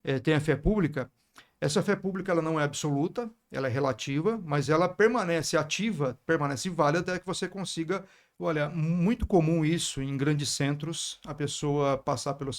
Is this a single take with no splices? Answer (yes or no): no